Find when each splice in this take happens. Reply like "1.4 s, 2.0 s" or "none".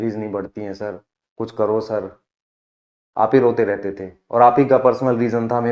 none